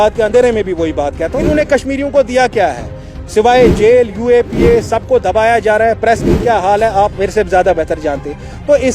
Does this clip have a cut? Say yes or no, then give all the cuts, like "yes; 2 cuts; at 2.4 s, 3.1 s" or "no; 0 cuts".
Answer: yes; 1 cut; at 1.5 s